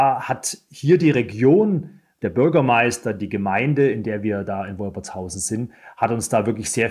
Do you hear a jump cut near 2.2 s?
yes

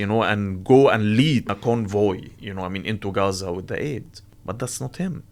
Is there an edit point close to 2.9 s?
no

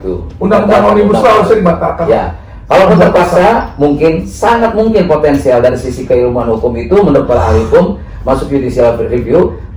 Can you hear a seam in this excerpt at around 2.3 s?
no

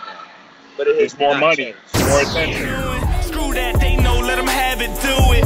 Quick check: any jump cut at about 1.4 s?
no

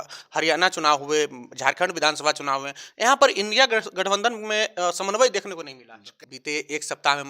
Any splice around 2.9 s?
no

